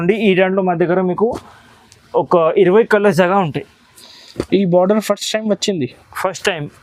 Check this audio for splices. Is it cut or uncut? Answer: uncut